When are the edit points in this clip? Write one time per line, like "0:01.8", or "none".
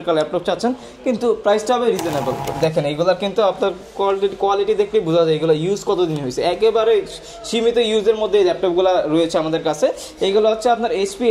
0:02.5